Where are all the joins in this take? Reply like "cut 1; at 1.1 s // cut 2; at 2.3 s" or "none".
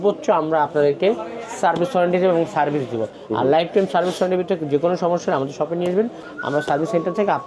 none